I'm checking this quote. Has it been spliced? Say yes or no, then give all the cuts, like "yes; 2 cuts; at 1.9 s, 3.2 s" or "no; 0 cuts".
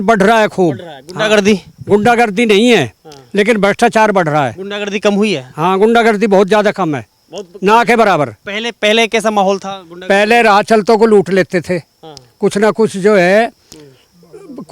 no; 0 cuts